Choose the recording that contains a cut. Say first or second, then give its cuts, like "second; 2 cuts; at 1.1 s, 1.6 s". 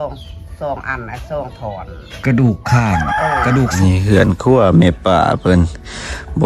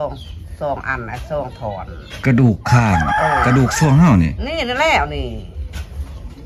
first; 1 cut; at 3.7 s